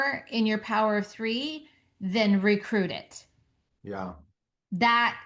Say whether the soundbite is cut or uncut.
uncut